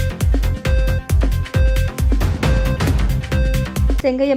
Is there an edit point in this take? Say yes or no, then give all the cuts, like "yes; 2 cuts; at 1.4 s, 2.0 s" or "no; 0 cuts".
yes; 1 cut; at 1.0 s